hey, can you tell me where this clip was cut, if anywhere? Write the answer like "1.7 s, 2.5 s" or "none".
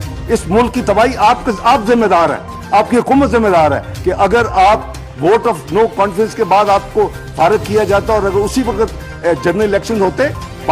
3.9 s